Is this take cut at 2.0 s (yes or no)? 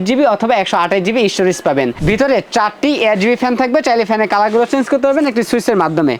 yes